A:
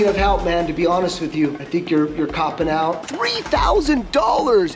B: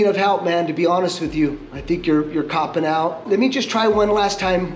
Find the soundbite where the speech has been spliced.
A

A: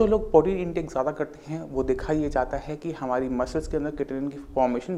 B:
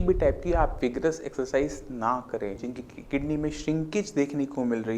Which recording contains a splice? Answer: B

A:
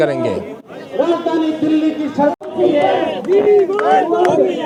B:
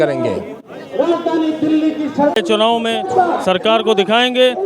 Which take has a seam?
B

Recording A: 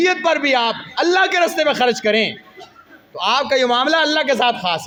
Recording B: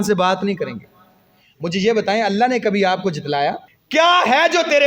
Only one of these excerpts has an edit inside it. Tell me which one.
B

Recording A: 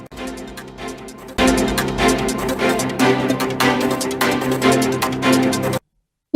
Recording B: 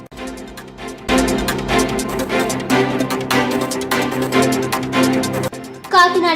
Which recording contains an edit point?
B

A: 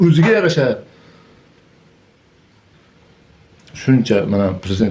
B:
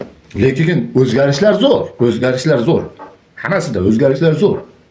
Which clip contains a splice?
A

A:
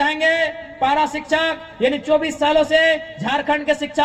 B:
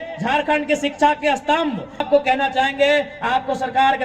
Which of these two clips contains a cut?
B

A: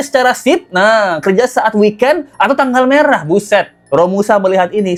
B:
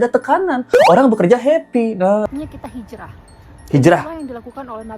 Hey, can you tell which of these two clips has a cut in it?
B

